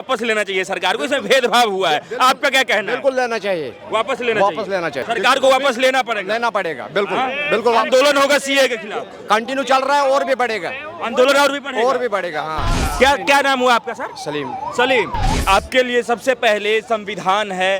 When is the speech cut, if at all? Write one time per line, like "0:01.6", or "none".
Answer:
0:05.0
0:12.8
0:15.4

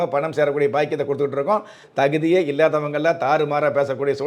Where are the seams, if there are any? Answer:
0:01.8

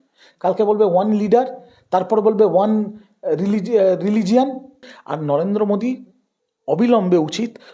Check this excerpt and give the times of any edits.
0:04.8

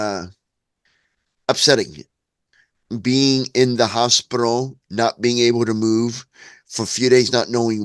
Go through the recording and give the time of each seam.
0:02.0

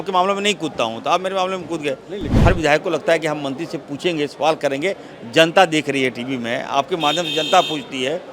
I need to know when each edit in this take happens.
0:02.3

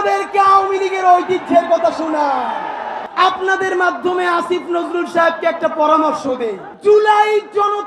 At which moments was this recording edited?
0:03.0
0:06.7

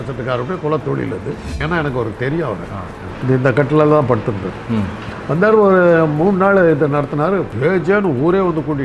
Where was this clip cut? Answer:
0:01.5
0:03.1
0:05.0
0:07.5

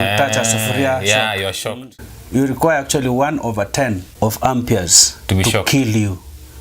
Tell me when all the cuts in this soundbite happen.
0:01.9
0:04.1

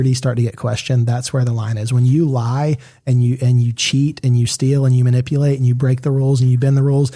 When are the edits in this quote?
none

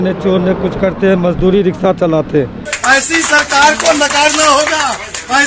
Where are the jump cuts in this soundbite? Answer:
0:02.7

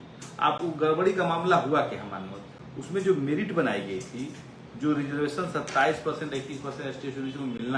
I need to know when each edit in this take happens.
none

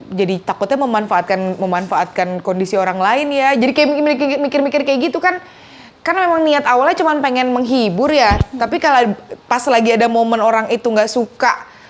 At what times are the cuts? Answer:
none

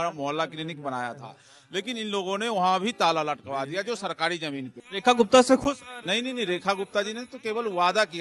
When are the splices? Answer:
0:04.7

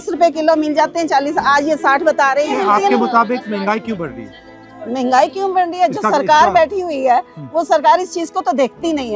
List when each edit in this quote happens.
none

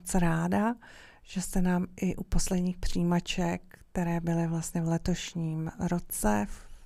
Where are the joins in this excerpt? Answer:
none

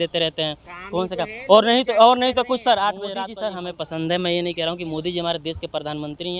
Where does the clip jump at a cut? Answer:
0:03.3

